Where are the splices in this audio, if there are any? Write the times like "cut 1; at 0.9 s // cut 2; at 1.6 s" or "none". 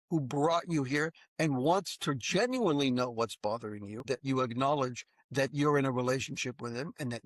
cut 1; at 4.1 s